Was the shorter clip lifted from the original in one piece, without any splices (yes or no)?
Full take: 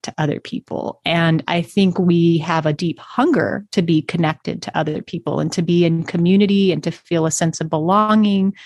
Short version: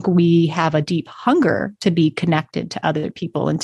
yes